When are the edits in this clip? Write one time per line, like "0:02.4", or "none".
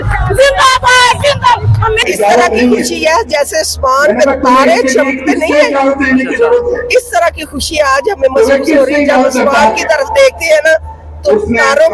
0:02.0